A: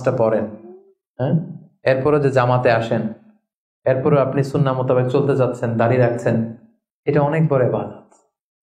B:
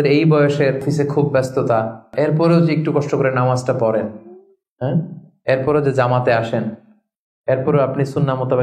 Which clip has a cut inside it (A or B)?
B